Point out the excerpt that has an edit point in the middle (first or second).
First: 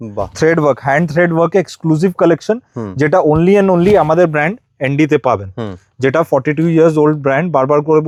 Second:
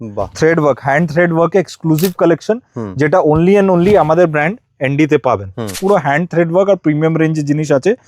second